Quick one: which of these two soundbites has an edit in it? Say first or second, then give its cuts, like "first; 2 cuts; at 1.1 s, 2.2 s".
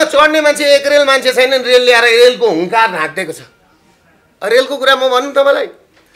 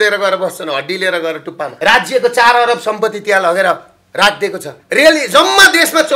second; 2 cuts; at 1.7 s, 4.7 s